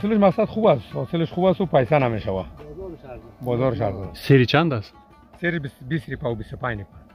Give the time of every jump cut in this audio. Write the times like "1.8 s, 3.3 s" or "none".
none

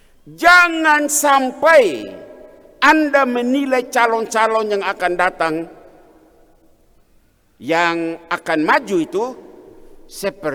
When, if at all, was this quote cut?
none

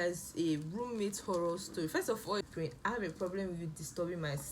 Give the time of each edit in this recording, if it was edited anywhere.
2.4 s

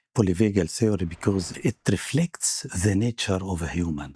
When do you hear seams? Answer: 1.6 s

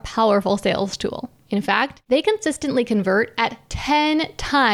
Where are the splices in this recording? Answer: 1.7 s

